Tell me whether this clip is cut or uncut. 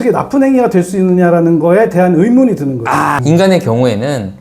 cut